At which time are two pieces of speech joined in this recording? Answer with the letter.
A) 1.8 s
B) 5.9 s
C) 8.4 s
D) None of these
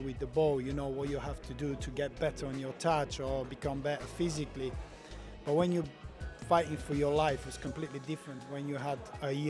C